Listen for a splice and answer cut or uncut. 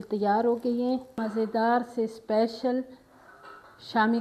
cut